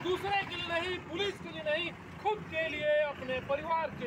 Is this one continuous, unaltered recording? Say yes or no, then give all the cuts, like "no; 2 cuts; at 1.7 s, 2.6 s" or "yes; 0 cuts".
yes; 0 cuts